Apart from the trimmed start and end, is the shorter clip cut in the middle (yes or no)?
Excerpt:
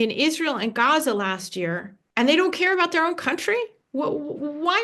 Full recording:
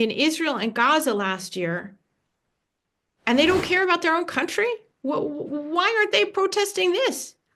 yes